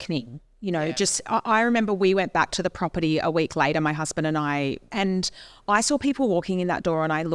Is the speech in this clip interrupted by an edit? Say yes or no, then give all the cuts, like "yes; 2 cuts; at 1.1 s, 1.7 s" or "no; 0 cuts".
yes; 1 cut; at 4.9 s